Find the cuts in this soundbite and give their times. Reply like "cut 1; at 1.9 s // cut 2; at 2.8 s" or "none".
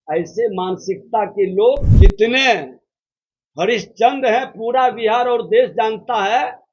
cut 1; at 1.9 s